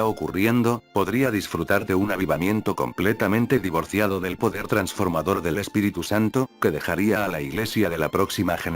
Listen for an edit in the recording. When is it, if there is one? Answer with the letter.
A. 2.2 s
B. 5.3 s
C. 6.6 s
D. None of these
A